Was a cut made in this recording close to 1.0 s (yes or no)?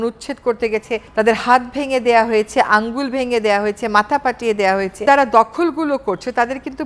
yes